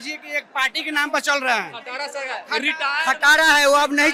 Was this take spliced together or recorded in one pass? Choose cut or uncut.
uncut